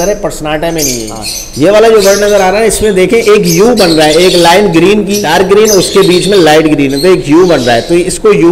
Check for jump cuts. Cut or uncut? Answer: cut